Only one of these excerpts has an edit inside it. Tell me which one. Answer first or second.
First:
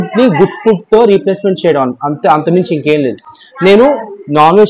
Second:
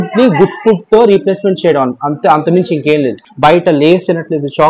second